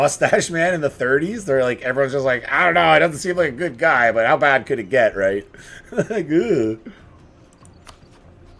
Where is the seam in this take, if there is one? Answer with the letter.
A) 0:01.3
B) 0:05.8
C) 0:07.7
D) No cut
D